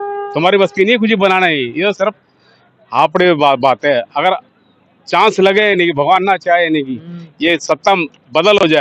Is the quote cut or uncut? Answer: uncut